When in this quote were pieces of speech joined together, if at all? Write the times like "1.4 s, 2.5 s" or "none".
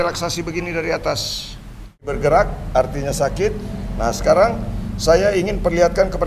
2.1 s